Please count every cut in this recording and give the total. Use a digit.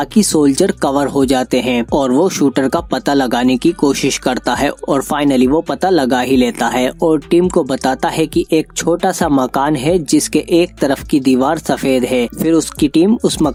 0